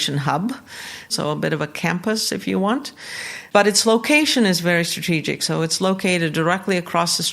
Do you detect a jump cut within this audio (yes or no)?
yes